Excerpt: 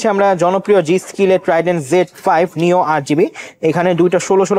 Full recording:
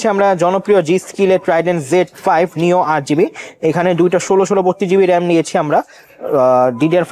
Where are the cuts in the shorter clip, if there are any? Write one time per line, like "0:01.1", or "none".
none